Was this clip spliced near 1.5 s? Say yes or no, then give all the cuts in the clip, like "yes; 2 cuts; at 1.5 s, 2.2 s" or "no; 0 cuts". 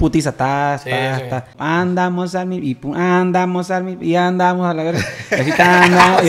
yes; 1 cut; at 1.5 s